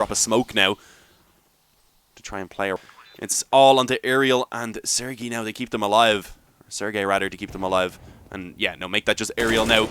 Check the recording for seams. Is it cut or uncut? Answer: cut